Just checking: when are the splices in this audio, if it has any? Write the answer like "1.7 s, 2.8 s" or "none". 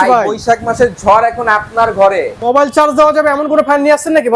2.4 s